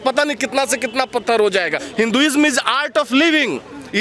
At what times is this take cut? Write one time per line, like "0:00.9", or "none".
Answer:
0:01.8